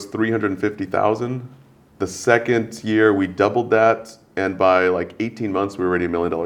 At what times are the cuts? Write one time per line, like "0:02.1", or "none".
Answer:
none